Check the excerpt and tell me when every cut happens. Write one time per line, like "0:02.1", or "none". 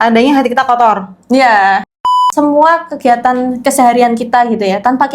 0:02.1